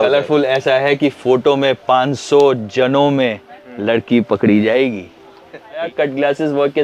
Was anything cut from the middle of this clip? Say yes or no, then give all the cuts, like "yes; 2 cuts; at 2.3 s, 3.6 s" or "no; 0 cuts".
yes; 1 cut; at 5.8 s